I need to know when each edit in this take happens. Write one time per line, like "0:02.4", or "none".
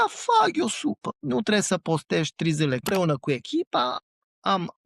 0:01.1
0:02.8
0:03.9